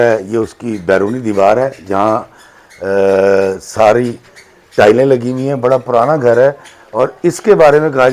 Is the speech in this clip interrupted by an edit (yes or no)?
no